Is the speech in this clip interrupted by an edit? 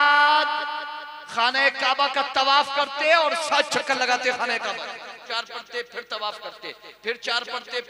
yes; 1 cut; at 5.2 s

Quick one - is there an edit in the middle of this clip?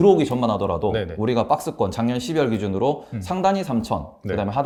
no; 0 cuts

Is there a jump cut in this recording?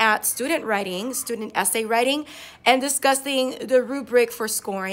no; 0 cuts

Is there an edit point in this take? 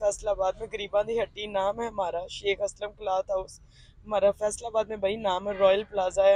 no; 0 cuts

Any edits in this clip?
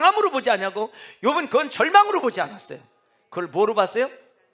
no; 0 cuts

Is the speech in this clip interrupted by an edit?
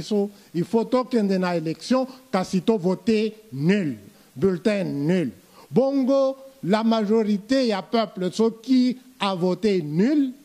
no; 0 cuts

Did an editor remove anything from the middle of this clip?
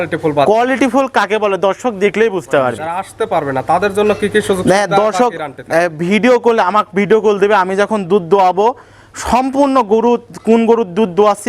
yes; 1 cut; at 2.8 s

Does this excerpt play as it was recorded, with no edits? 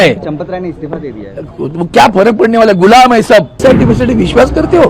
no; 1 cut; at 3.6 s

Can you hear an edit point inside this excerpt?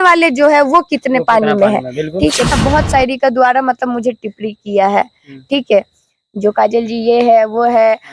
yes; 1 cut; at 2.5 s

